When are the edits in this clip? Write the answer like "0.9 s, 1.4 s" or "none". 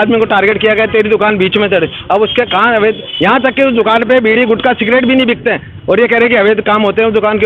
none